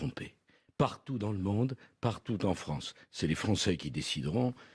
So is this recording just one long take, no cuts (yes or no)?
no